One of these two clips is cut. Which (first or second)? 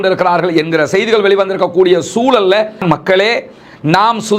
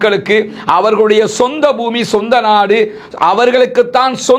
first